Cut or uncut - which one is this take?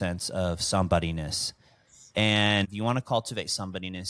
cut